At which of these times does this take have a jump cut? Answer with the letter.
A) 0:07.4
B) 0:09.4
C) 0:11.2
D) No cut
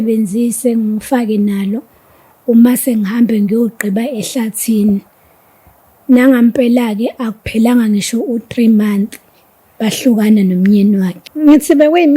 C